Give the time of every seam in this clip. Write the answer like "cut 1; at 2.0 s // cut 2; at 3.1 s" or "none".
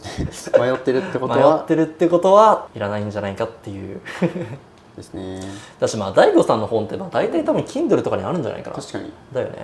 none